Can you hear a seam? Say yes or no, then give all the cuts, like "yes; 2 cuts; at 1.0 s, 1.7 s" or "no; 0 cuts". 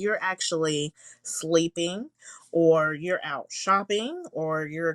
no; 0 cuts